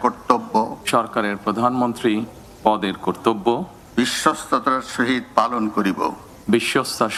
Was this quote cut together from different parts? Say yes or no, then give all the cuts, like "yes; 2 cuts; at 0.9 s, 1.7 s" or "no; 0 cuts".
no; 0 cuts